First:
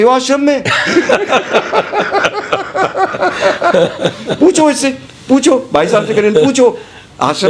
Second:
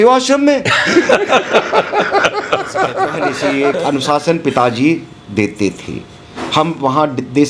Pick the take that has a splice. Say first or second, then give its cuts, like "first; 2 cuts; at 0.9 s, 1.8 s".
second; 1 cut; at 3.4 s